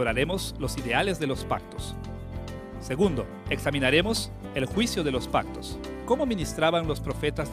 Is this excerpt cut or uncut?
cut